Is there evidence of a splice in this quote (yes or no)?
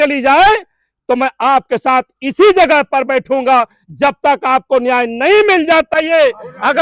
yes